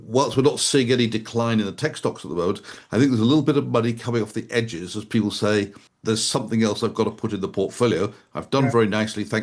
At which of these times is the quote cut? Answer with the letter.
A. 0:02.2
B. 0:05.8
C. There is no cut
B